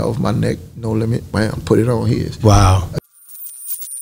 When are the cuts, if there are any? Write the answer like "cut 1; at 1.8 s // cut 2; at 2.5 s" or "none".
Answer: cut 1; at 3.0 s